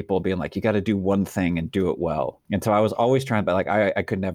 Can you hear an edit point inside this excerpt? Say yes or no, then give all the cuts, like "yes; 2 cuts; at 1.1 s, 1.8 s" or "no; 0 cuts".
yes; 1 cut; at 2.4 s